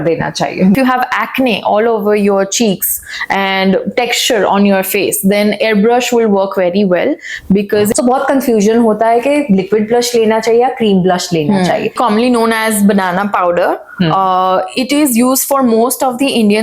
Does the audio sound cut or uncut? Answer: cut